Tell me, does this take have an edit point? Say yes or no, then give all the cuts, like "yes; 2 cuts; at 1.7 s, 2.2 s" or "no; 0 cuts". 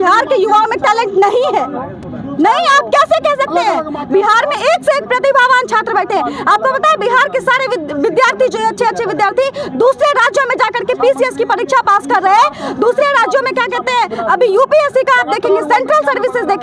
no; 0 cuts